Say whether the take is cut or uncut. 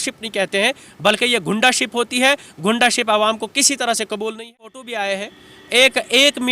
cut